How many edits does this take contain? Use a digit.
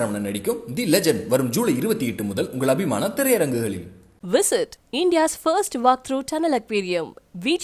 0